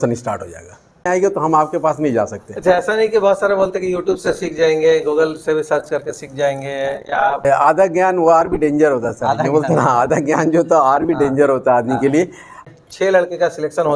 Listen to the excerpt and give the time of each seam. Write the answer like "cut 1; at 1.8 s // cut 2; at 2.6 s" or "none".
cut 1; at 1.0 s // cut 2; at 7.4 s // cut 3; at 12.5 s